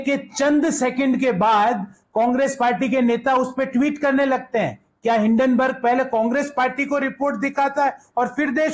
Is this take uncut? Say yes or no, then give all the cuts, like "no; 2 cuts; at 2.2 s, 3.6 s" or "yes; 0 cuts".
yes; 0 cuts